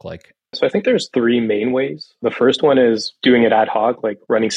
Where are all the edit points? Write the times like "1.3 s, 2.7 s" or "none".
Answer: 0.8 s, 3.1 s